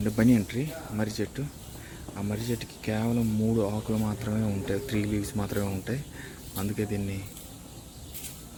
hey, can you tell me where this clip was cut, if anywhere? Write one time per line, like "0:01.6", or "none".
none